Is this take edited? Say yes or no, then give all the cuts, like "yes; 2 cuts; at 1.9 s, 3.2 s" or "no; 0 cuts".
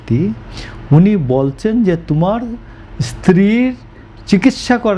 no; 0 cuts